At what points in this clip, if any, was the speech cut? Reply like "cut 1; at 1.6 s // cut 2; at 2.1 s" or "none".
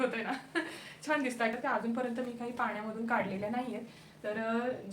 cut 1; at 1.6 s